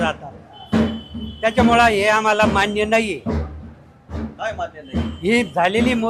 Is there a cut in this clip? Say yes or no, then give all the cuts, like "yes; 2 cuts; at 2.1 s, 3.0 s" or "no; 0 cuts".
no; 0 cuts